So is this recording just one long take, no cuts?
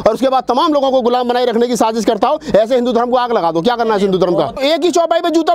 no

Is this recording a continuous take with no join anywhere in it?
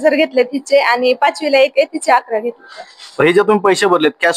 no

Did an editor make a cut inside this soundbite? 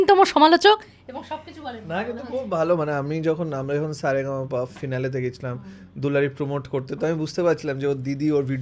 no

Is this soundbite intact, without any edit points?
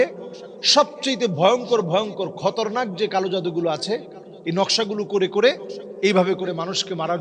yes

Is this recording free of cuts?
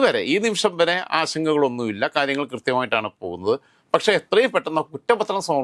yes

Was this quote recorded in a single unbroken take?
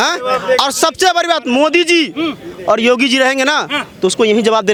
yes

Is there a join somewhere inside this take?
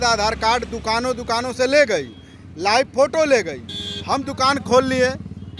no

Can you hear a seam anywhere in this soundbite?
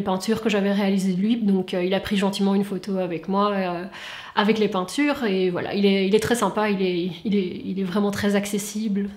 no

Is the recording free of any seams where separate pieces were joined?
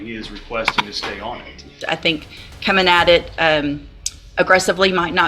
no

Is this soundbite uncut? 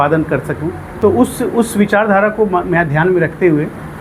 yes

